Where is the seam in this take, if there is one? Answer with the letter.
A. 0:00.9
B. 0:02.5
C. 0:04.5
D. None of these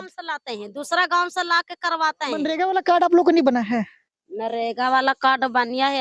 B